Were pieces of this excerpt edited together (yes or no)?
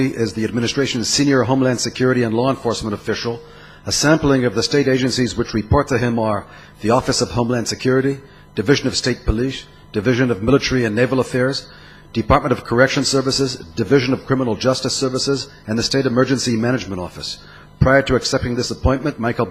yes